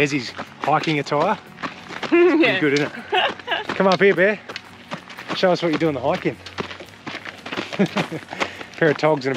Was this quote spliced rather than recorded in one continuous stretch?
no; 0 cuts

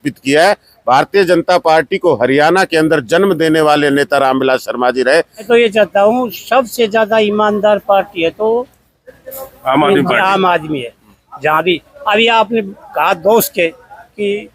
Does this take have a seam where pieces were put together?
yes; 1 cut; at 5.4 s

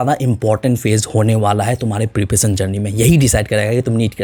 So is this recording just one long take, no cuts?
yes; 0 cuts

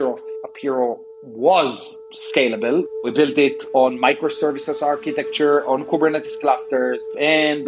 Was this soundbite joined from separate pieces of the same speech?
yes; 1 cut; at 2.9 s

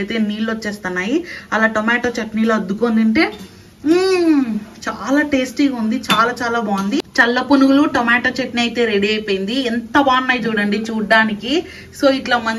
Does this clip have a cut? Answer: yes; 1 cut; at 7.1 s

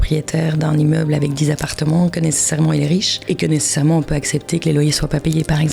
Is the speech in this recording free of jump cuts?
no; 1 cut; at 3.1 s

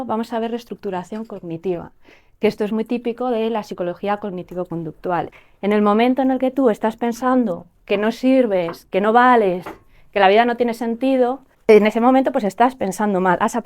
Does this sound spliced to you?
yes; 2 cuts; at 5.3 s, 11.5 s

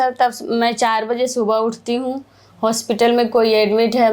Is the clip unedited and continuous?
yes; 0 cuts

